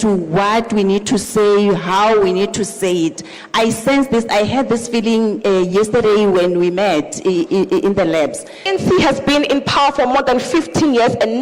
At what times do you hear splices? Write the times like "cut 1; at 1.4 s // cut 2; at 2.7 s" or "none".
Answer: cut 1; at 8.6 s